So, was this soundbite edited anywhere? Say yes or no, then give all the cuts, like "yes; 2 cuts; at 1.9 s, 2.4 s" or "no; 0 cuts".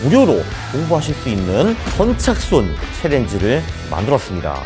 no; 0 cuts